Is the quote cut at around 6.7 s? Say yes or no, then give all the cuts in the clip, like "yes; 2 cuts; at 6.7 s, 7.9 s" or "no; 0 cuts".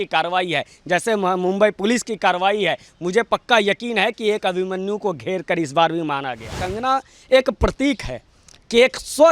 yes; 1 cut; at 6.7 s